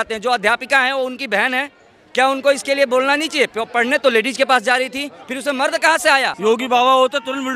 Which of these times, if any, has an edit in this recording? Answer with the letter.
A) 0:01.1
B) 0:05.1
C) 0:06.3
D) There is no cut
C